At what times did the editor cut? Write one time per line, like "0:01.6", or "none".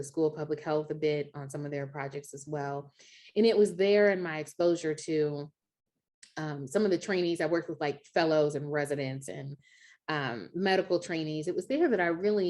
none